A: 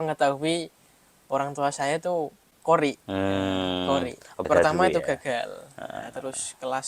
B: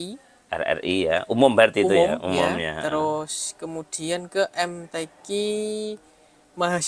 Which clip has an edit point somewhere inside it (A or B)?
A